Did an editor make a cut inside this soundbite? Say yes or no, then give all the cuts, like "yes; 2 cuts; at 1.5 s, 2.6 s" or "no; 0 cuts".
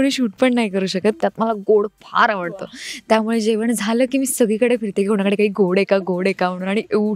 yes; 1 cut; at 1.2 s